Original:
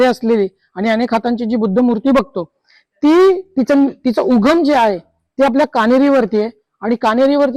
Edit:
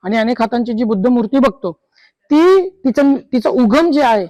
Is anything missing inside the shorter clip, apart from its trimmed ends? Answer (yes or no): no